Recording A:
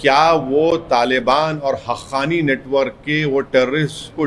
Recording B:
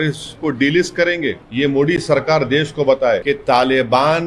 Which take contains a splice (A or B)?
B